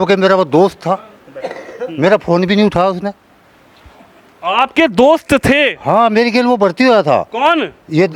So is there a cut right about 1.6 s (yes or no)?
no